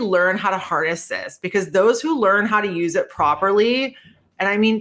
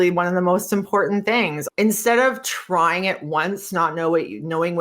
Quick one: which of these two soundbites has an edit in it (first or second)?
second